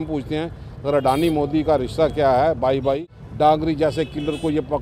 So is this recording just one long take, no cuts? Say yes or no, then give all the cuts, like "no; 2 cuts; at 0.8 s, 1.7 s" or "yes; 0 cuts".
no; 1 cut; at 3.2 s